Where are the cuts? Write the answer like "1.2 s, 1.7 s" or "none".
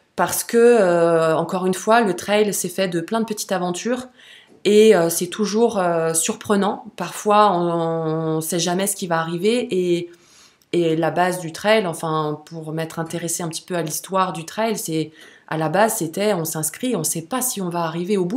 none